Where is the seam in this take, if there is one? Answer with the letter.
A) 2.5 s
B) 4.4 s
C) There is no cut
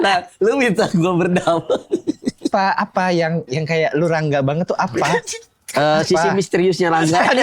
A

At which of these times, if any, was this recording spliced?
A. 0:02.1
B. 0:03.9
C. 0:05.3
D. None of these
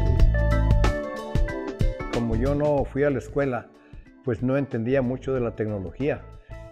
A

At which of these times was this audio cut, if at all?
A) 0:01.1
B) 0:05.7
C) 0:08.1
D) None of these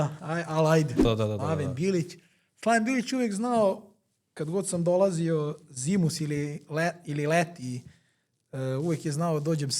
A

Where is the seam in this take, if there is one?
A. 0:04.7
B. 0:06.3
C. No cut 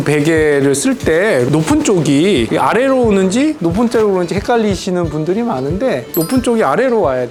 C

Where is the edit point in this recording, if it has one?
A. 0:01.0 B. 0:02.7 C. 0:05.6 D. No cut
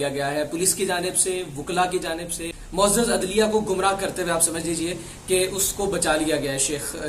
B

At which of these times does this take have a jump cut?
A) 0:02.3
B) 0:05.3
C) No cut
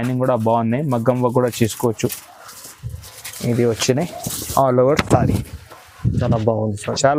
C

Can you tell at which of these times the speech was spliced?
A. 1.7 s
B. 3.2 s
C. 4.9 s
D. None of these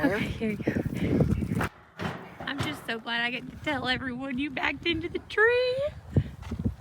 A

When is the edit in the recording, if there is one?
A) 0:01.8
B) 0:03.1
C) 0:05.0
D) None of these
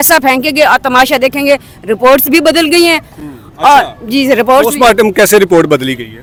D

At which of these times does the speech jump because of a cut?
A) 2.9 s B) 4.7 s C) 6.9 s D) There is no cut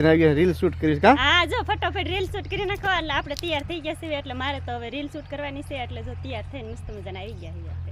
D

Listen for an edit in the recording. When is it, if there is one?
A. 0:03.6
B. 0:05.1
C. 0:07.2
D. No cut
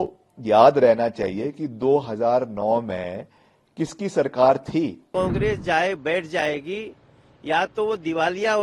B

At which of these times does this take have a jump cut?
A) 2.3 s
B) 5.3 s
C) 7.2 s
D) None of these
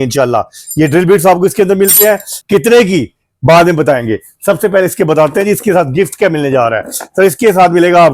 A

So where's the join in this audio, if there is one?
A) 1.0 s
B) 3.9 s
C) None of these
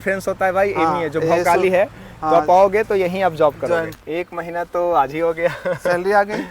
B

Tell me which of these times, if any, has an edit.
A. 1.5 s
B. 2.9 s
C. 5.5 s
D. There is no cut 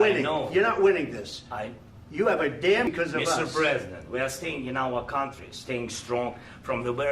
B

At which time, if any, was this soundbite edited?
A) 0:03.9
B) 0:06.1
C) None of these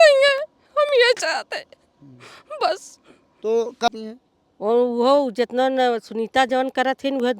A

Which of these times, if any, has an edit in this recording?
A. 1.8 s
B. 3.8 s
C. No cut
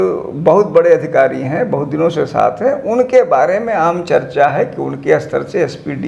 C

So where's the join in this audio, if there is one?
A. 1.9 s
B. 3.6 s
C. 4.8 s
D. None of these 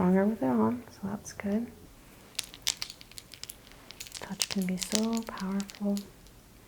A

